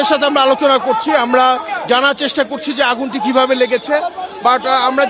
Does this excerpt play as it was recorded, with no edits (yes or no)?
yes